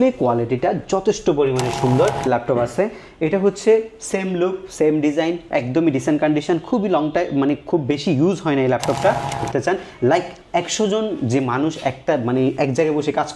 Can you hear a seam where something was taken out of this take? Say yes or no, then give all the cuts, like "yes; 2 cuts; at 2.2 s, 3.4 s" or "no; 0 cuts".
yes; 2 cuts; at 2.2 s, 9.4 s